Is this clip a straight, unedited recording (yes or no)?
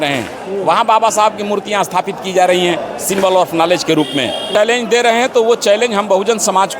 no